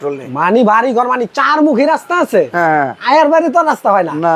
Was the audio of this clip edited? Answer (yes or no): no